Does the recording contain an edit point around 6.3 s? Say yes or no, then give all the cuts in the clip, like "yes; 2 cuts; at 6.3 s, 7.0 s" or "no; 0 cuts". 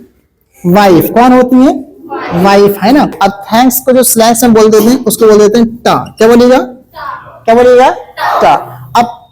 no; 1 cut; at 3.1 s